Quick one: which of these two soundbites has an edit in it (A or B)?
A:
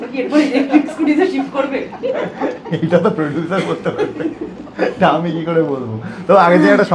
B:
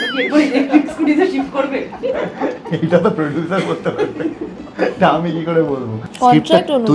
B